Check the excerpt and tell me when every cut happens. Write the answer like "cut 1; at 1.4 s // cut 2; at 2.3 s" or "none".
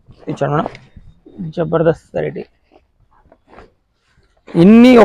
none